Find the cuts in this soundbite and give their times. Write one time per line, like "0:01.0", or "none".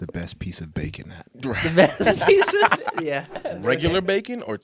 0:03.4